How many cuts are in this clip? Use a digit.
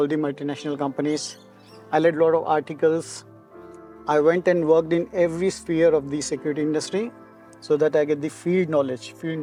0